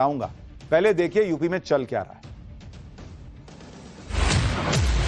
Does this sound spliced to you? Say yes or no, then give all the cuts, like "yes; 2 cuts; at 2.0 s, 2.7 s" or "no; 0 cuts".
no; 0 cuts